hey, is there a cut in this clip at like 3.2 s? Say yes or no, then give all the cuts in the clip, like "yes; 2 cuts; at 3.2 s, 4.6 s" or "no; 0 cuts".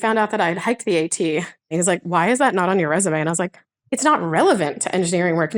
no; 1 cut; at 1.7 s